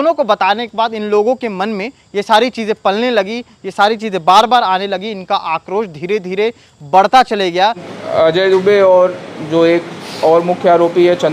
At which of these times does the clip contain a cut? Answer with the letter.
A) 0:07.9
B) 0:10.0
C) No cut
A